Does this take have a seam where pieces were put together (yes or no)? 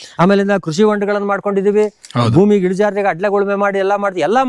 no